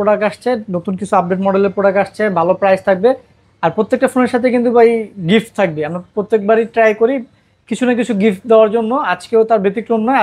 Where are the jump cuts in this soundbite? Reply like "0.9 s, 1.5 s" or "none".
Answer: none